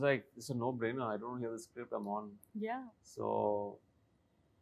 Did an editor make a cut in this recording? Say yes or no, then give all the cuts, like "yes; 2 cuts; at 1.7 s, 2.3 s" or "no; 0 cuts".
no; 0 cuts